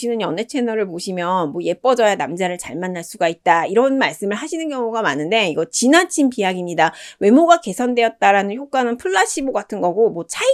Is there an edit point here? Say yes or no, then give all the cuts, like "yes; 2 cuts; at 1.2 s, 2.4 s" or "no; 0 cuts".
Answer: no; 0 cuts